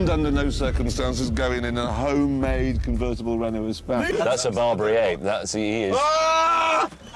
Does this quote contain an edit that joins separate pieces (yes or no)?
no